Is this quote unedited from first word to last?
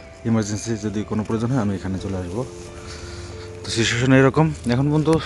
yes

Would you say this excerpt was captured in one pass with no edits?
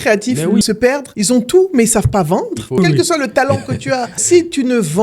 no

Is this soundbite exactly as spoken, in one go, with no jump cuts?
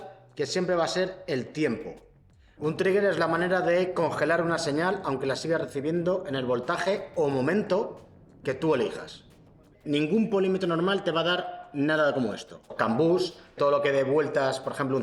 no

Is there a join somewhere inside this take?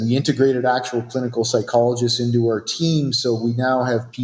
no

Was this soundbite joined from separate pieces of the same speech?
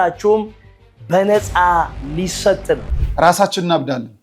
yes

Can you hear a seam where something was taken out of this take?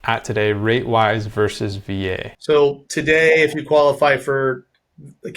yes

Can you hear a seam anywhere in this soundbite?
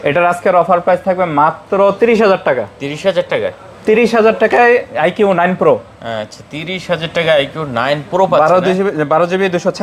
no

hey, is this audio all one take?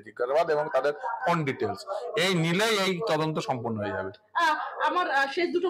yes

